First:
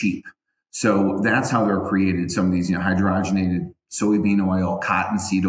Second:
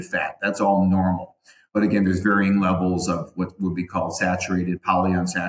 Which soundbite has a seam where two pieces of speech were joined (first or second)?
second